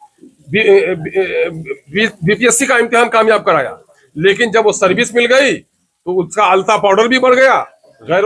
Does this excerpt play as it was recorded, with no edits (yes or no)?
yes